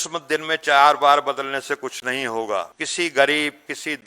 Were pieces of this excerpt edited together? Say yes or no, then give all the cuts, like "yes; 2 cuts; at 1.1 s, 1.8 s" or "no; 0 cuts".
yes; 1 cut; at 2.8 s